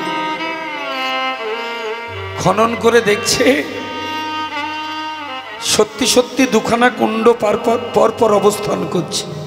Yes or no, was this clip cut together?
no